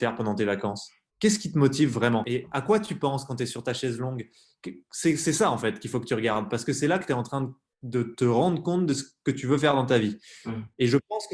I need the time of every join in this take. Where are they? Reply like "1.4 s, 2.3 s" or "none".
2.3 s